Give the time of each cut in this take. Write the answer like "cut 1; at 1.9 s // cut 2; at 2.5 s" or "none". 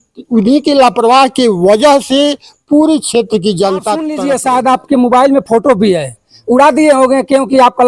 cut 1; at 4.1 s